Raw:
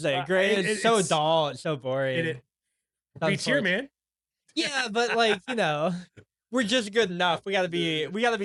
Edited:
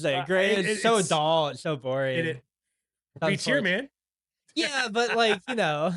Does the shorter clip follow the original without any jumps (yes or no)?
yes